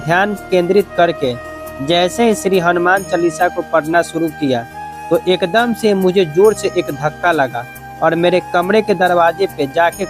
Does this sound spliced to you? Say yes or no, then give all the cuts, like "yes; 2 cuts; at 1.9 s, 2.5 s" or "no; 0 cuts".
no; 0 cuts